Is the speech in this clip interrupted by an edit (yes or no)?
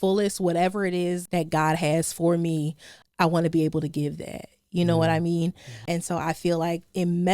yes